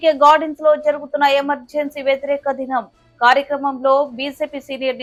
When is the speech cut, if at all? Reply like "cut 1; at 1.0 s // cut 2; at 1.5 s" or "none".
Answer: none